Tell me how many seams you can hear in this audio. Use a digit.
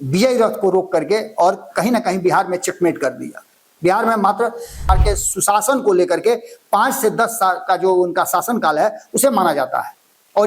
1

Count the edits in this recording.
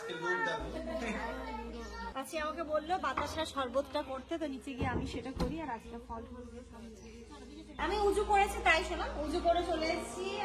2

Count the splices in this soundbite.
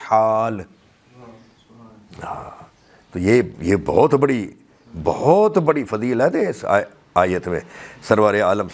0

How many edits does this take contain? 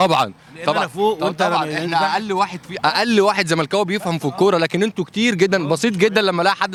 0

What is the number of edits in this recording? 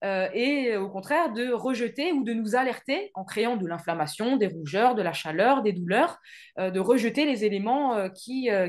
0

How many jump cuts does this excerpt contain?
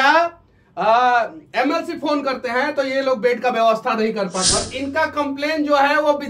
1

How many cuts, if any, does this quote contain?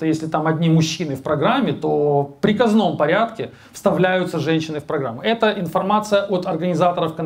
0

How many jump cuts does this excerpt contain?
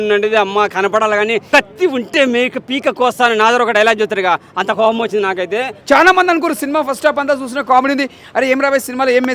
2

